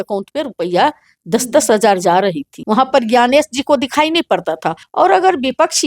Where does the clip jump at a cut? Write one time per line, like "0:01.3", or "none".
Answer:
0:02.5
0:04.8